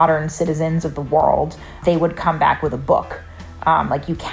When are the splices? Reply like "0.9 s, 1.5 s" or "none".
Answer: 1.8 s